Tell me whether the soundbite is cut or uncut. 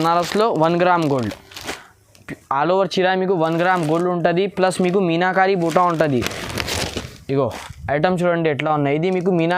uncut